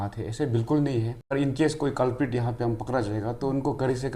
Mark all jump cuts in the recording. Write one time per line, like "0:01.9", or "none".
0:01.2